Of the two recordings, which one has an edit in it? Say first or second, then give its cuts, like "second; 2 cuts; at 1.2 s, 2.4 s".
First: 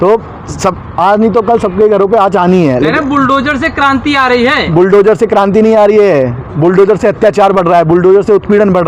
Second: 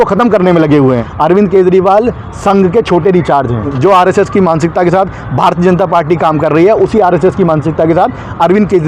second; 2 cuts; at 1.1 s, 3.7 s